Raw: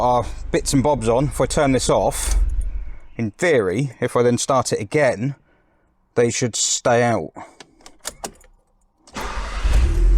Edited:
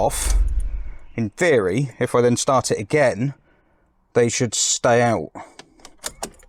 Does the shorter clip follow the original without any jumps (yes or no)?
yes